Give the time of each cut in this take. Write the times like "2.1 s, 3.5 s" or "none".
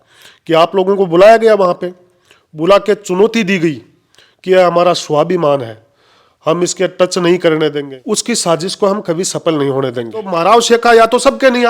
7.9 s, 10.3 s